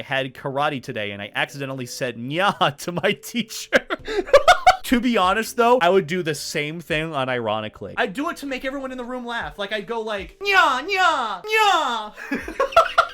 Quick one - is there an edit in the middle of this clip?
yes; 2 cuts; at 4.8 s, 7.8 s

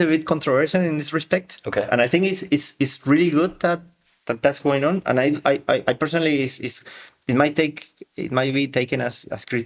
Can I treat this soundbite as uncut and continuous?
yes; 0 cuts

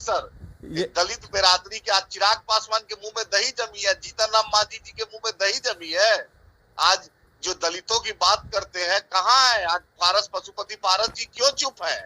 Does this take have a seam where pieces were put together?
no; 0 cuts

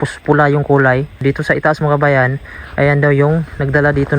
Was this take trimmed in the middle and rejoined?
yes; 1 cut; at 1.2 s

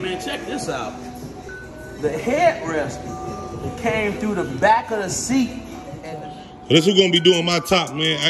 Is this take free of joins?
no; 1 cut; at 5.9 s

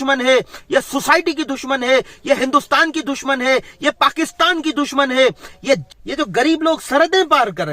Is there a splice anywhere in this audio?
yes; 1 cut; at 5.9 s

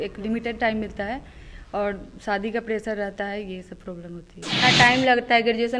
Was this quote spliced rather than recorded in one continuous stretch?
yes; 1 cut; at 4.6 s

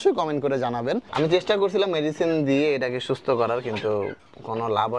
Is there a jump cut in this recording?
yes; 1 cut; at 1.1 s

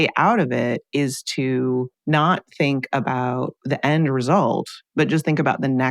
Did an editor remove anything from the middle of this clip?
yes; 3 cuts; at 1.9 s, 3.6 s, 4.8 s

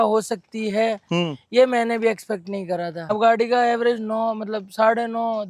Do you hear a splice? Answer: yes; 1 cut; at 3.1 s

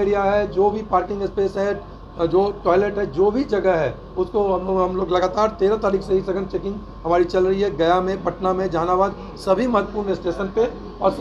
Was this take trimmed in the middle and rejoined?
no; 0 cuts

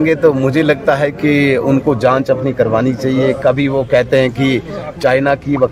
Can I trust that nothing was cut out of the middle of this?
yes; 0 cuts

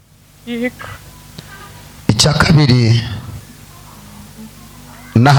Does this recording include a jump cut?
no; 0 cuts

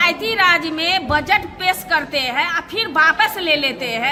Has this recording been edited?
no; 0 cuts

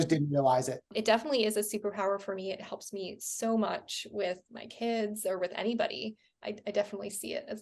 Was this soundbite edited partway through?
yes; 2 cuts; at 0.9 s, 6.3 s

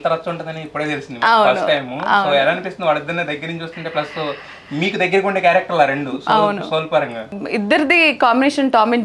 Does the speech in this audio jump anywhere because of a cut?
yes; 1 cut; at 7.3 s

